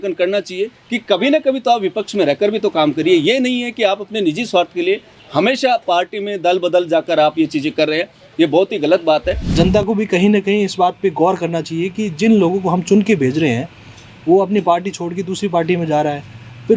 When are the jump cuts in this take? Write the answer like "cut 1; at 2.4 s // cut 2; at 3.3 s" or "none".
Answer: cut 1; at 9.5 s

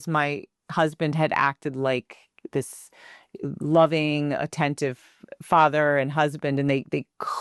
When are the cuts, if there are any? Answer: none

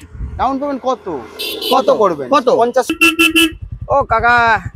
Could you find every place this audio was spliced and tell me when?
cut 1; at 2.9 s

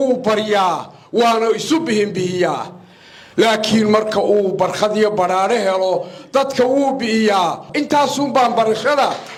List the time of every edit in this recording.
none

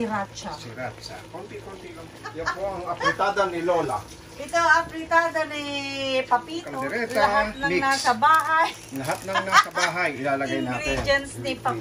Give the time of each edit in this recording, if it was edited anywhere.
cut 1; at 2.2 s // cut 2; at 6.7 s

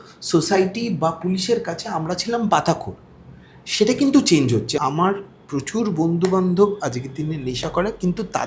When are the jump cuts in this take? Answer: cut 1; at 4.8 s

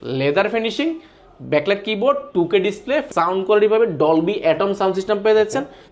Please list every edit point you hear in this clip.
cut 1; at 3.1 s

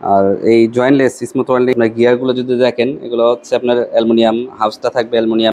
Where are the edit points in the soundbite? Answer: cut 1; at 1.7 s

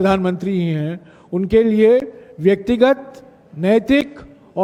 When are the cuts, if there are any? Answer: none

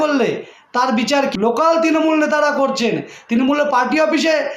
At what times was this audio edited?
cut 1; at 1.3 s

